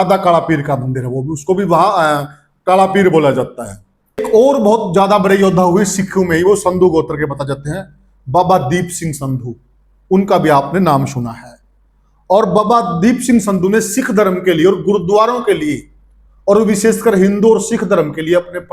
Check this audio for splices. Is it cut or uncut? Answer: cut